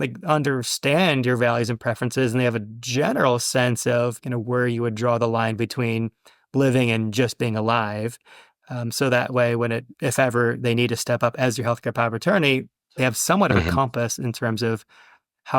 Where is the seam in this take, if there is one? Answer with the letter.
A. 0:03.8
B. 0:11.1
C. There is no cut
C